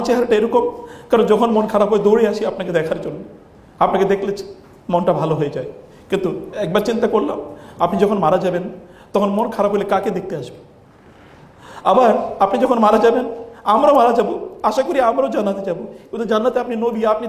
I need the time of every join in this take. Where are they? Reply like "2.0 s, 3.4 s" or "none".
none